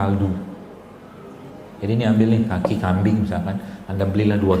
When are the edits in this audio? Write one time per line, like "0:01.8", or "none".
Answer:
none